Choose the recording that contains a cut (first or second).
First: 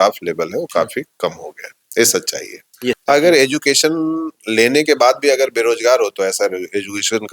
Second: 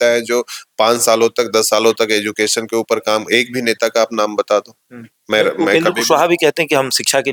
first